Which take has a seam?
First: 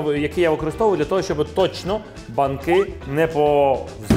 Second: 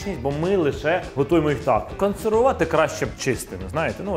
second; 3 cuts; at 1.1 s, 1.9 s, 3.2 s

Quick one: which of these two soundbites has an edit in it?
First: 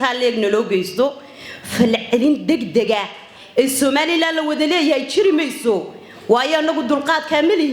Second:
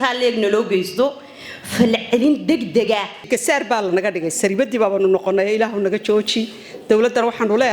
second; 1 cut; at 3.3 s

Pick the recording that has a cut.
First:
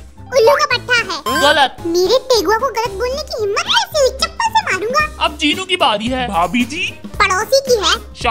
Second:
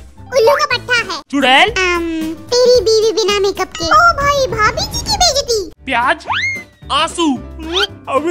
second; 2 cuts; at 1.1 s, 5.7 s

